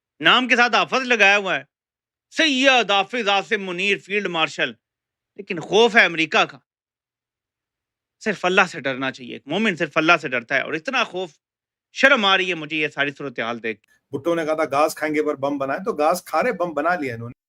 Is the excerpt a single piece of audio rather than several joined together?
yes; 0 cuts

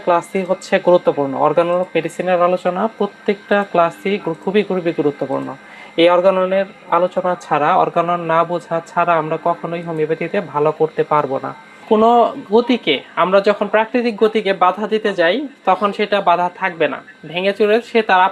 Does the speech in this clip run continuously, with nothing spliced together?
no; 1 cut; at 11.8 s

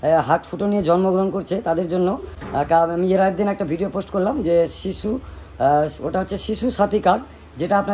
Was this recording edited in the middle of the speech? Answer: no; 0 cuts

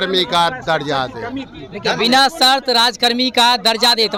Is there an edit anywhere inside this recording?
no; 0 cuts

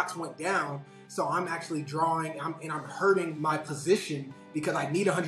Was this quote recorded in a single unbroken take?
no; 1 cut; at 3.3 s

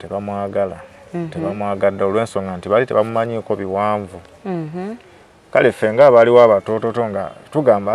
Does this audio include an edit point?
yes; 1 cut; at 4.2 s

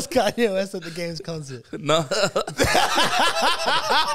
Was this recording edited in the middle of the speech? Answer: no; 0 cuts

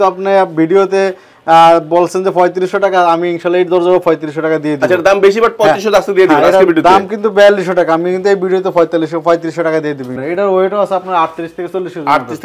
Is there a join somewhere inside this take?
yes; 1 cut; at 10.1 s

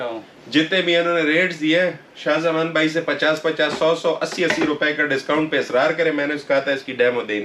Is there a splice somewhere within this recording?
no; 0 cuts

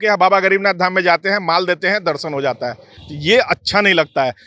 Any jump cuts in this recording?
no; 0 cuts

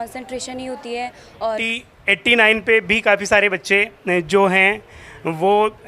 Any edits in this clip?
yes; 1 cut; at 1.6 s

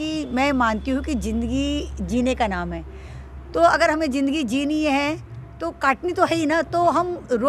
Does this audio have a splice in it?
no; 0 cuts

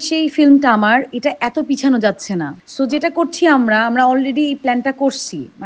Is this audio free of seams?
yes; 0 cuts

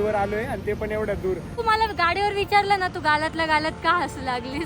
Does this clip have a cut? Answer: yes; 1 cut; at 1.6 s

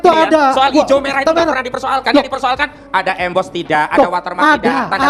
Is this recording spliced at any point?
no; 0 cuts

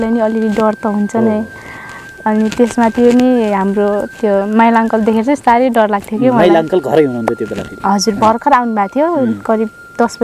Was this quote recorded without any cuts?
yes; 0 cuts

